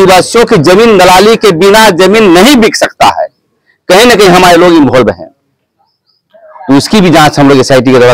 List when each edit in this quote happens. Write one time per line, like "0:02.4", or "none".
none